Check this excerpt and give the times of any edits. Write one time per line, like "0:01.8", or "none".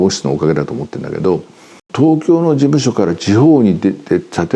0:01.9